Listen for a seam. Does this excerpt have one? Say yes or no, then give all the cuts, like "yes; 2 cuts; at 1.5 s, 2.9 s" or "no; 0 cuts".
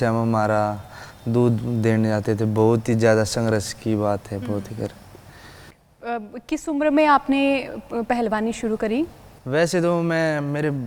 no; 0 cuts